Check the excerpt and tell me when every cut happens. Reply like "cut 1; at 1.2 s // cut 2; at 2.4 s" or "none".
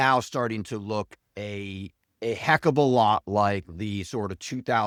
none